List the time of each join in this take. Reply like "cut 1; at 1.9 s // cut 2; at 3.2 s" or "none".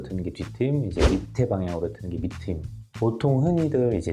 none